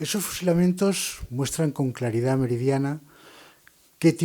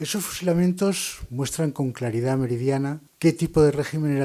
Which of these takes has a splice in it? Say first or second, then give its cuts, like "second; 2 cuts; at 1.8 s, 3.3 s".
second; 1 cut; at 3.0 s